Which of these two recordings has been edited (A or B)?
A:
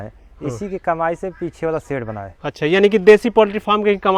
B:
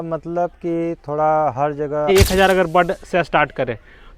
B